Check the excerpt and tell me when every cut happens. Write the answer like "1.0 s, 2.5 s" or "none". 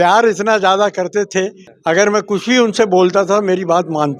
1.6 s